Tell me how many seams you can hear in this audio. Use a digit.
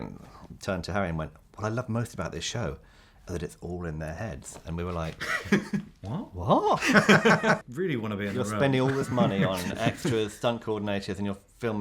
1